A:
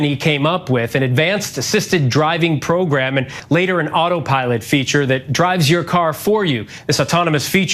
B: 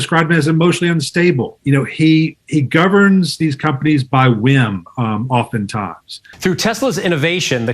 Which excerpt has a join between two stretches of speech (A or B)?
B